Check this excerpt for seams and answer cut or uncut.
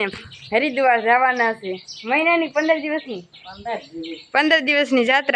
uncut